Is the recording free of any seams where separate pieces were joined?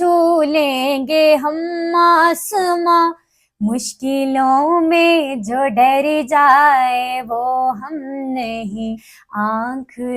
no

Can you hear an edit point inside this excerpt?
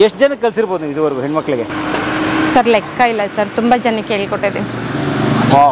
no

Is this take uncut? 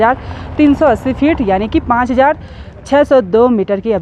yes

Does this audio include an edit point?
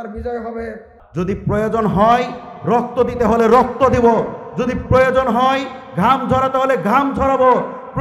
yes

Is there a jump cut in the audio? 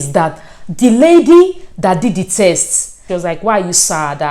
yes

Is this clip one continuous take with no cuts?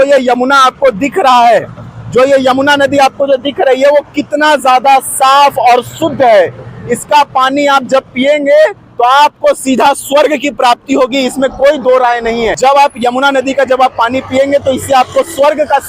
no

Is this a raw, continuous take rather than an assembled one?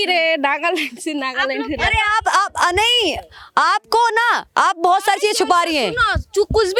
yes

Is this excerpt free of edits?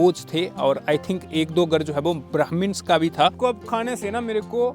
no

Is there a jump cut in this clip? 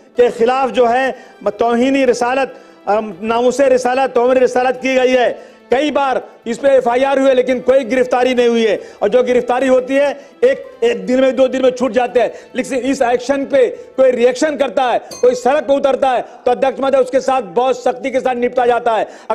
no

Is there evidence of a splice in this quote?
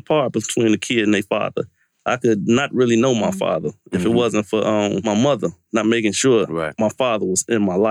yes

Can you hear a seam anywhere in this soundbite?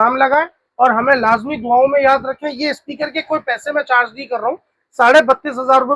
no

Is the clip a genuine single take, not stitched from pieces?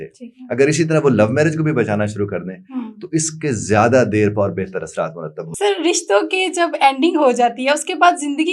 no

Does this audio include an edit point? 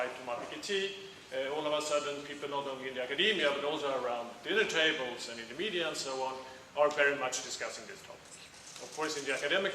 yes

